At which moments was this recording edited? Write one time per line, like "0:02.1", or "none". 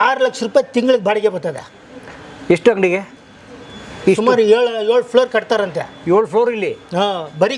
none